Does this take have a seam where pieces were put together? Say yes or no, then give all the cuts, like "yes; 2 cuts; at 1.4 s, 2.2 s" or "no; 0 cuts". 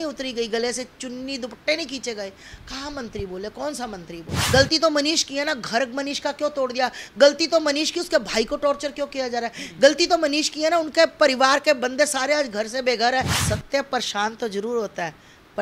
yes; 2 cuts; at 4.3 s, 13.4 s